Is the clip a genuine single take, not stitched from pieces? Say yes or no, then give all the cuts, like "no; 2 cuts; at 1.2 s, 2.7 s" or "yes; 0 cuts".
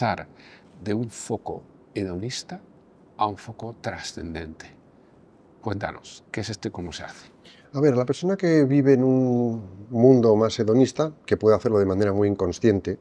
yes; 0 cuts